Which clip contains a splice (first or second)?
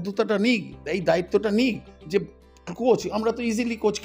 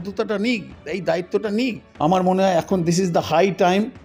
second